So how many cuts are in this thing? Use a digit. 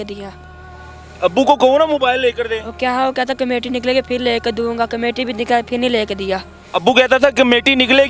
0